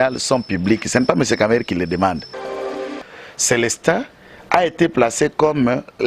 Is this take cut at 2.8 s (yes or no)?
yes